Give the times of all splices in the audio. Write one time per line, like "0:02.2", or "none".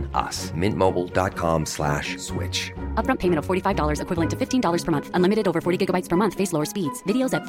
none